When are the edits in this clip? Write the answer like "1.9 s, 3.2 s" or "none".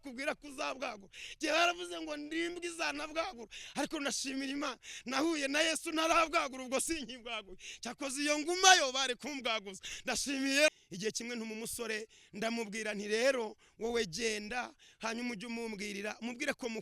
10.7 s